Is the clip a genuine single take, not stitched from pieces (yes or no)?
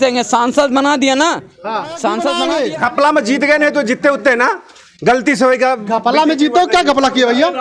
no